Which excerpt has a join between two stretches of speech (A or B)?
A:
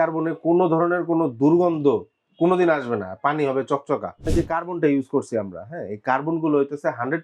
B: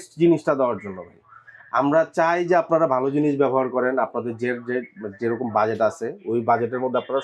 A